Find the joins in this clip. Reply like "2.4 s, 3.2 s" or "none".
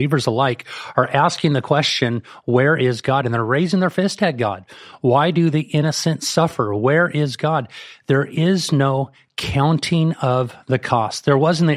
none